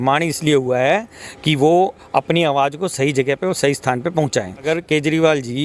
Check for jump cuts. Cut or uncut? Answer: cut